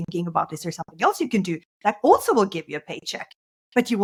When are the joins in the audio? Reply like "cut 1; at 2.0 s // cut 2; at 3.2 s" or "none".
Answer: none